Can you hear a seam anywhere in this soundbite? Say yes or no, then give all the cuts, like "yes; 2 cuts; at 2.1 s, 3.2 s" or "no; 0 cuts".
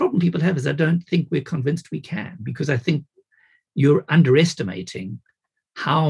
no; 0 cuts